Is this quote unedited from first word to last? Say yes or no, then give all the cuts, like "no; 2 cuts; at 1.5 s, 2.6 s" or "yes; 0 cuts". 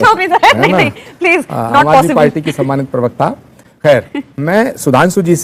yes; 0 cuts